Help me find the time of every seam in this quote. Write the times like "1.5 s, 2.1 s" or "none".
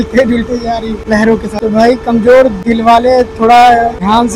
none